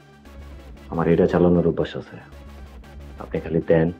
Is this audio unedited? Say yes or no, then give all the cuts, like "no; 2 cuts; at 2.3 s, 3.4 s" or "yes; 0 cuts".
yes; 0 cuts